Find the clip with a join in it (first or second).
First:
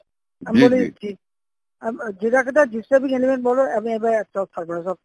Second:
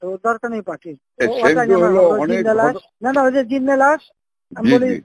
second